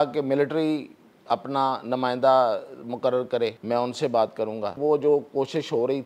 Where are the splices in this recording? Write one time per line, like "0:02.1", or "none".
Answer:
0:03.6
0:04.8